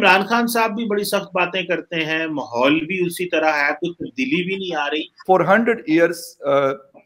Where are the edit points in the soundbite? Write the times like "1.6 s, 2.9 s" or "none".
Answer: 5.1 s